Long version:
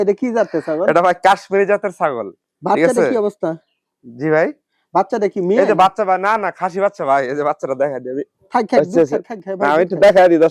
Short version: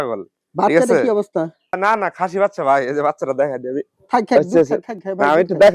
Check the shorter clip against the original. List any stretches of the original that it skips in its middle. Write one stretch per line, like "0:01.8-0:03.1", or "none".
0:03.9-0:06.2